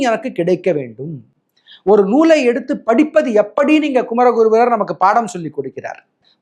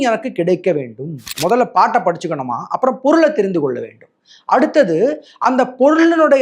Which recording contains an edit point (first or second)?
second